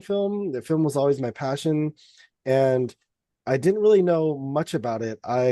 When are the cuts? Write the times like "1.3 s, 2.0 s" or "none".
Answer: none